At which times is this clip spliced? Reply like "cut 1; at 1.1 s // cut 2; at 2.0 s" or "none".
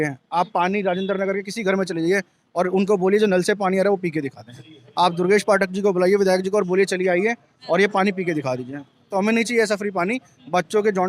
none